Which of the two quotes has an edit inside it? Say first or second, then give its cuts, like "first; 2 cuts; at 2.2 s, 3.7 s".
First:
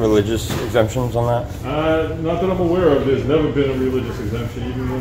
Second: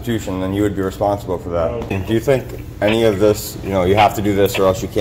second; 1 cut; at 2.0 s